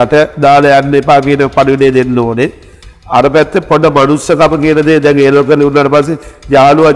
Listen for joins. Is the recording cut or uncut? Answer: uncut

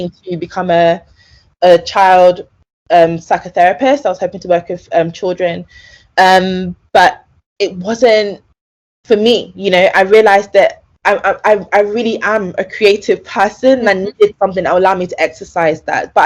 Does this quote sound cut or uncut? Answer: uncut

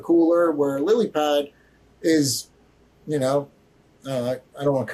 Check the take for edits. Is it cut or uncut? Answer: uncut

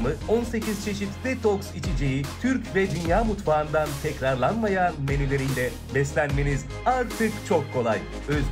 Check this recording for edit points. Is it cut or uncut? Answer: uncut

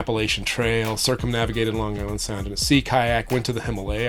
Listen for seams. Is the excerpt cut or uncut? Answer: uncut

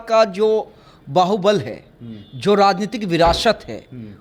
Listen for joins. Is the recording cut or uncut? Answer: uncut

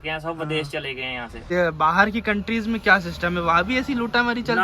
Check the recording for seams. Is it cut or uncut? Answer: cut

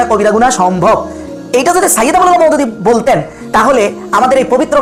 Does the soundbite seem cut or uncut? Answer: uncut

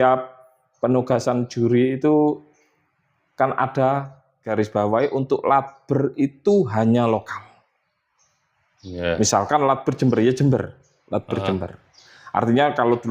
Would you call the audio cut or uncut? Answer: cut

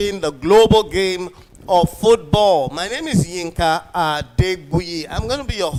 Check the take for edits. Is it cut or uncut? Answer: uncut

